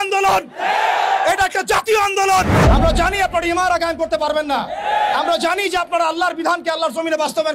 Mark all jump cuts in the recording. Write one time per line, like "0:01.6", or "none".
0:02.5